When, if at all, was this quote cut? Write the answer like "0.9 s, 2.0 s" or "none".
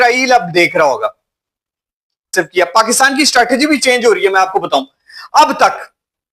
2.3 s